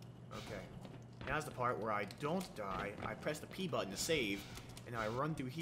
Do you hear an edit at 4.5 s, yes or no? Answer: no